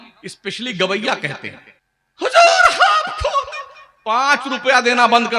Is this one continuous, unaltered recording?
no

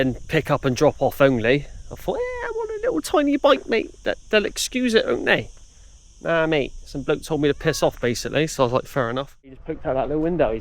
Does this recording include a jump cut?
yes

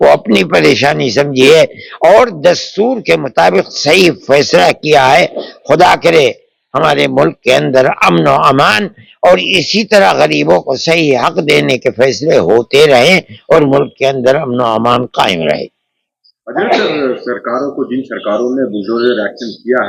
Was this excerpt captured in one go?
yes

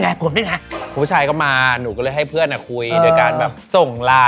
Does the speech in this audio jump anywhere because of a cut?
no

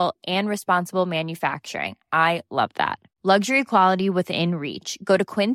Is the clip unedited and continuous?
yes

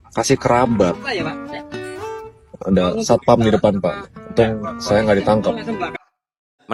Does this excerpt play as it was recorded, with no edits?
yes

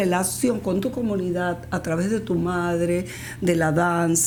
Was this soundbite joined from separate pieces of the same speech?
no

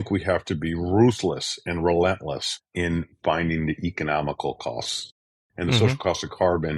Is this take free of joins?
no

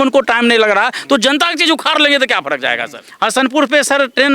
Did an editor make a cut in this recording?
yes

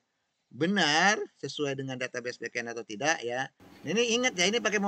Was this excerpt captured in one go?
no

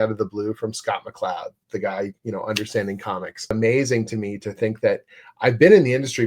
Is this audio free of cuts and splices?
no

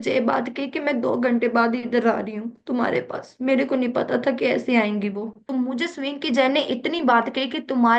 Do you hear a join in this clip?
yes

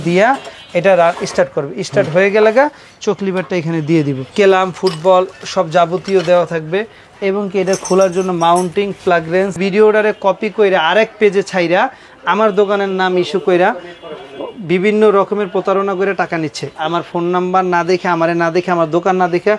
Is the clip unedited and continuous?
no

